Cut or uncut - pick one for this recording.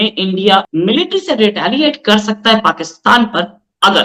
uncut